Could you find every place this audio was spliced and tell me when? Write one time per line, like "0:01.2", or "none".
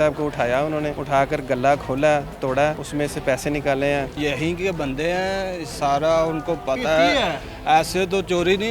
0:01.0
0:02.8
0:04.2